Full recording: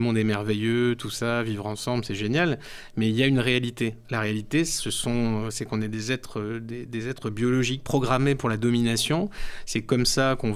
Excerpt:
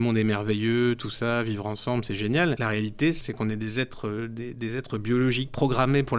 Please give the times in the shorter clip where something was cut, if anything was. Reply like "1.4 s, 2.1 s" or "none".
3.0 s